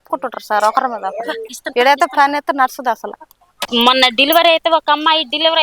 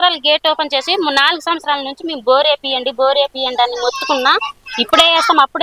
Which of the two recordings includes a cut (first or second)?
first